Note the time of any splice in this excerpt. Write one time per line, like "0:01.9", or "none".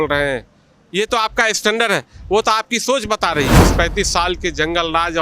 0:03.6